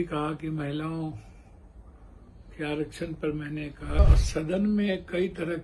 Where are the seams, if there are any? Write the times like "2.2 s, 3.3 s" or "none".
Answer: 4.0 s